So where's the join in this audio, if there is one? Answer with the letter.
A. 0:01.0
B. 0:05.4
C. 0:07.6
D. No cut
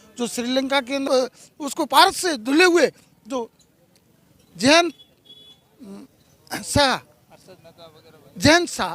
A